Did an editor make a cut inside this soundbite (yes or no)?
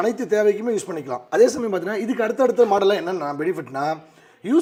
no